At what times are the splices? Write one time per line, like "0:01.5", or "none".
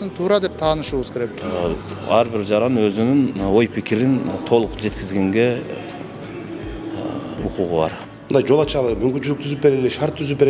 0:01.3
0:08.1